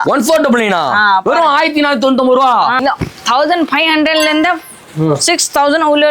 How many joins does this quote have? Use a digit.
1